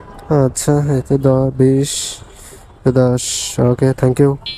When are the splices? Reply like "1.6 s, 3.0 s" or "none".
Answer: none